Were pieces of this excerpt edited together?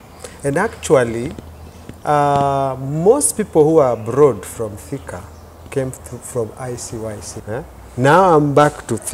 yes; 1 cut; at 7.3 s

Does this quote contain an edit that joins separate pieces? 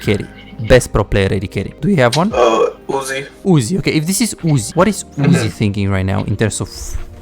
yes; 3 cuts; at 1.6 s, 2.8 s, 4.7 s

